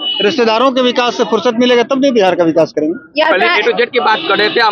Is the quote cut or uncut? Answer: uncut